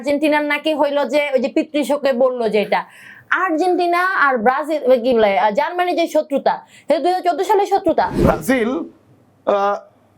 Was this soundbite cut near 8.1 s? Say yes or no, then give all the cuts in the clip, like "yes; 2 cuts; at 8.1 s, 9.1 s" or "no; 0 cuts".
yes; 1 cut; at 8.1 s